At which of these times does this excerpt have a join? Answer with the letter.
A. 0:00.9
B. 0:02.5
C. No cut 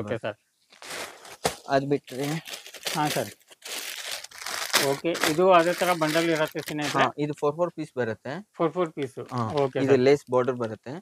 C